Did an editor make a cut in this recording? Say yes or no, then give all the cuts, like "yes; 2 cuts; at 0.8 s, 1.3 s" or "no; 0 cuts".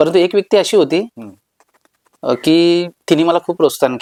no; 0 cuts